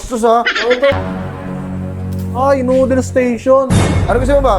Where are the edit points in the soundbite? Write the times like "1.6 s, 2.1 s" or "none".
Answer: 1.0 s

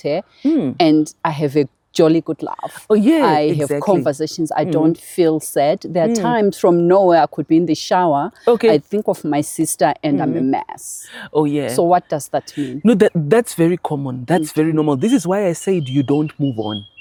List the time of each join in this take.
none

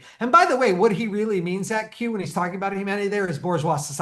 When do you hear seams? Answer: none

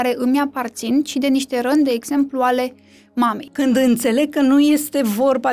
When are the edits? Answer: 3.4 s

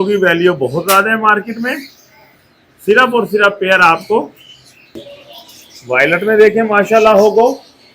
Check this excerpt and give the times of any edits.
5.0 s

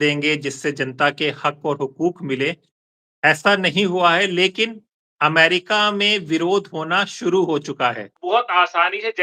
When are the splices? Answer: 8.1 s

